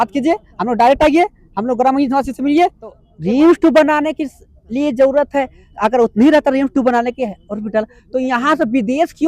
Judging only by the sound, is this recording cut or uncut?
cut